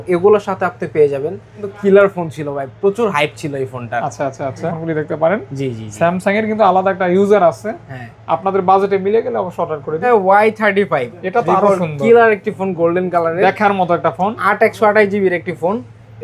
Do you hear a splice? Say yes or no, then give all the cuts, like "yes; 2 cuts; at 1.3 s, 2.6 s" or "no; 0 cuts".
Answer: yes; 3 cuts; at 1.7 s, 4.7 s, 10.1 s